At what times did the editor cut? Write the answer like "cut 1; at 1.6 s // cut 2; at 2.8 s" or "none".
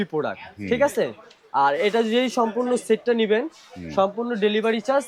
none